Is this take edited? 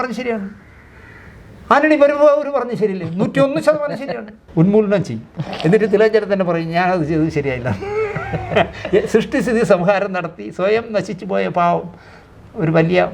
yes; 1 cut; at 4.4 s

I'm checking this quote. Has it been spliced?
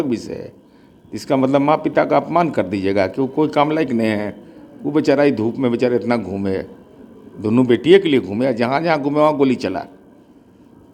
no; 0 cuts

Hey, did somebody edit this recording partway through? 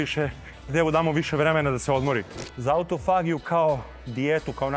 yes; 1 cut; at 2.5 s

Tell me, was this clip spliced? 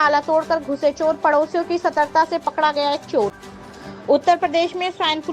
yes; 1 cut; at 3.3 s

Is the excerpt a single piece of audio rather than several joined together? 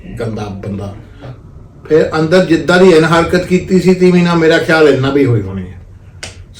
no; 1 cut; at 1.4 s

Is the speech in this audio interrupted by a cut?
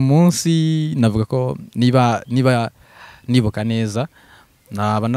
no; 0 cuts

